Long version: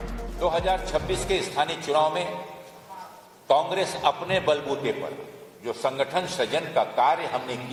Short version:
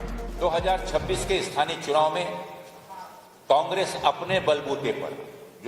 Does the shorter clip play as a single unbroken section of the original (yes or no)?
yes